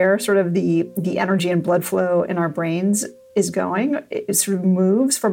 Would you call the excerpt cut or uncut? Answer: cut